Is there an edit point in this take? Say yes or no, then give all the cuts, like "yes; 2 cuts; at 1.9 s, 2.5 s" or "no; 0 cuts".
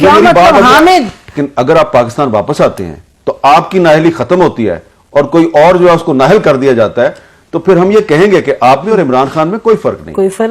yes; 1 cut; at 1.2 s